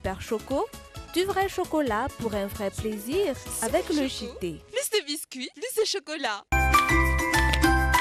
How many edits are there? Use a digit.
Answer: 1